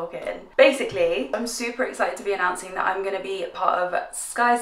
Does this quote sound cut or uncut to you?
uncut